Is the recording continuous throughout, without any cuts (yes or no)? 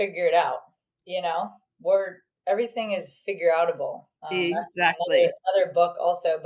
yes